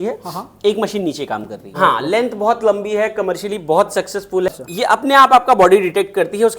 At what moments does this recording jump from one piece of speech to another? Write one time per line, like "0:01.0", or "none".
0:01.6
0:04.5